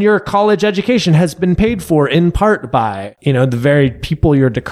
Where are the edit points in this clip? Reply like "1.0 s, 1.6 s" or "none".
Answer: 3.1 s